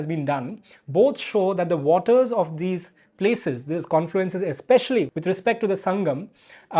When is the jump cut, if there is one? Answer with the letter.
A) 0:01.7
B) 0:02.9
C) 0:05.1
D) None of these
C